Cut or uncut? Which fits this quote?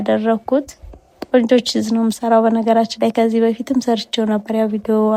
uncut